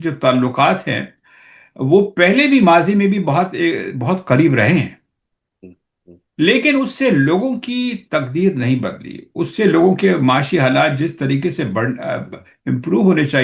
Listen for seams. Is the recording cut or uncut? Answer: uncut